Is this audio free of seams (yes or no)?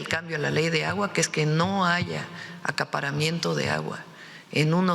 yes